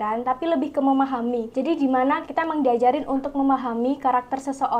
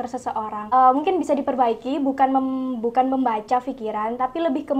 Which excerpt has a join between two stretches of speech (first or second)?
first